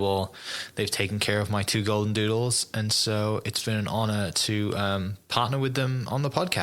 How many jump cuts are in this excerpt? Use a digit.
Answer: 0